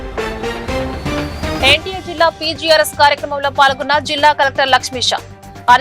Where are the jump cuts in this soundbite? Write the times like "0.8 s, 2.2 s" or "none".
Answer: 1.6 s

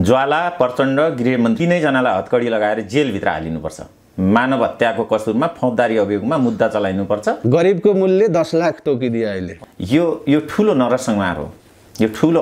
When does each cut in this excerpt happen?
7.4 s, 9.5 s

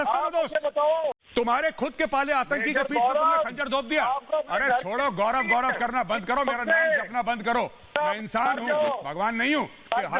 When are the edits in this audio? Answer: 1.2 s

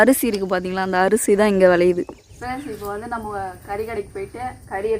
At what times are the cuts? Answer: 2.3 s

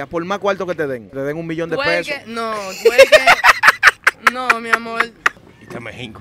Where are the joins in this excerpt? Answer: 1.1 s, 5.4 s

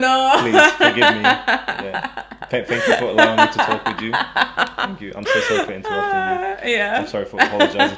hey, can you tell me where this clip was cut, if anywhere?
none

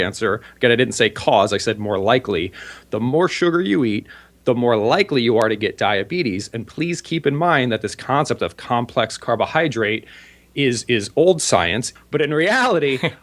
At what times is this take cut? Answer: 11.8 s

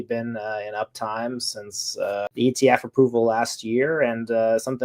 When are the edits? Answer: 2.3 s

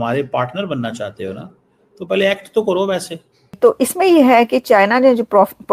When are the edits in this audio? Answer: 3.5 s

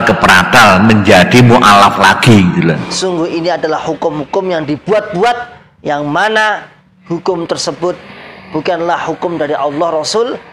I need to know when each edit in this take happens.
2.9 s

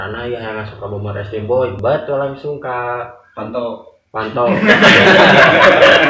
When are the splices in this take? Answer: 1.8 s

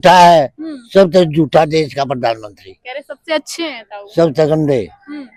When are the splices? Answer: none

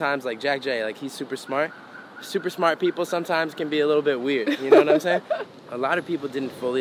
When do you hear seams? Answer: 5.5 s

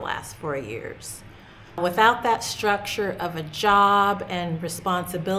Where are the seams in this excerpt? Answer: 1.8 s

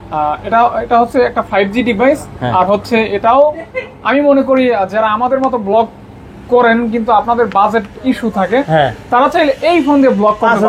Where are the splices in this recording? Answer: none

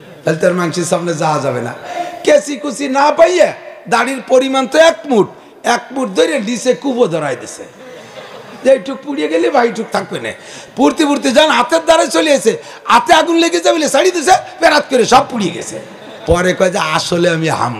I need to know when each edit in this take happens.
2.0 s

